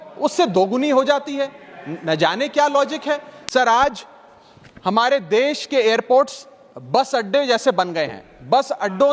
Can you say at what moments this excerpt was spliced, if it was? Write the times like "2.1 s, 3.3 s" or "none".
3.3 s